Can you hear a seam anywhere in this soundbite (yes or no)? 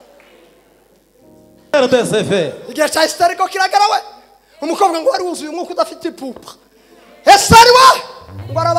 yes